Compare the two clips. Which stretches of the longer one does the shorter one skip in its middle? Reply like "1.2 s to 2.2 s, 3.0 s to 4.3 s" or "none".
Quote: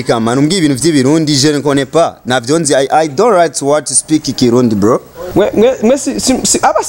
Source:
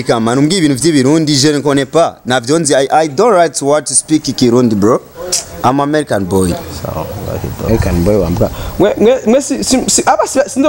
5.2 s to 8.6 s

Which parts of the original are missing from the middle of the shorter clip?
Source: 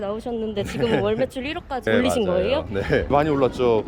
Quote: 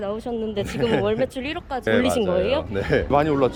none

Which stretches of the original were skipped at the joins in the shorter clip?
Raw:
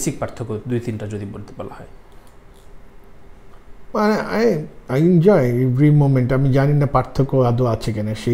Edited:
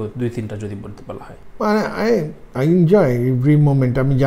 1.9 s to 3.7 s

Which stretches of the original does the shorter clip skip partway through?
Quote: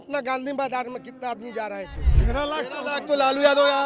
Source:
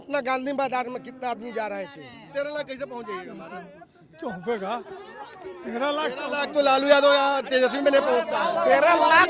2.0 s to 5.5 s

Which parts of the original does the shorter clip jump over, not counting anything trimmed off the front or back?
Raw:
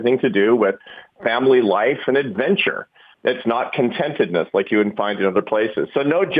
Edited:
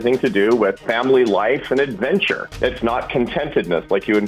0.9 s to 1.2 s, 2.8 s to 3.0 s

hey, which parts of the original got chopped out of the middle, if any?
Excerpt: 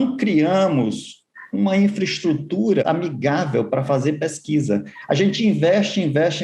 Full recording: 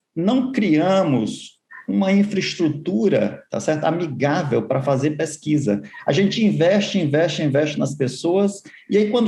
3.2 s to 3.8 s

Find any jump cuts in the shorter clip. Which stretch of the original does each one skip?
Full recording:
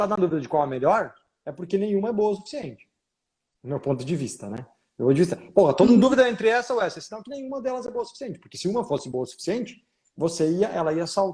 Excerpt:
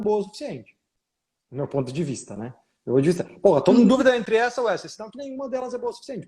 none

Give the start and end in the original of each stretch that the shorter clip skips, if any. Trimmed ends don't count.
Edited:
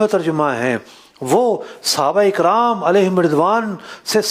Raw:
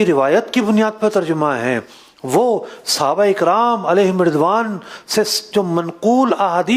none

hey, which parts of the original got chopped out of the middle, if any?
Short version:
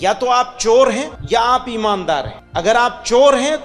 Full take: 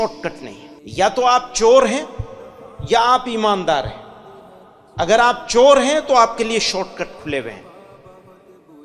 2.1 s to 2.7 s, 4.0 s to 4.8 s

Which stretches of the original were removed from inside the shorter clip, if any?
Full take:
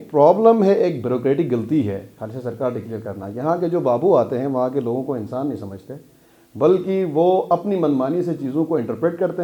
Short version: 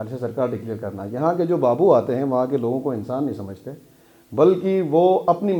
none

